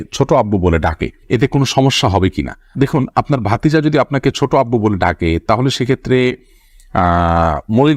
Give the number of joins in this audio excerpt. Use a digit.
0